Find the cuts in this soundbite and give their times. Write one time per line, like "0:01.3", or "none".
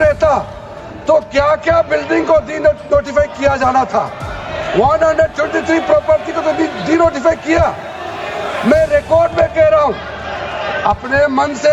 none

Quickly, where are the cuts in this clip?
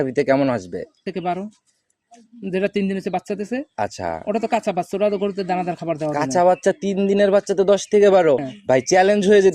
0:01.0
0:08.5

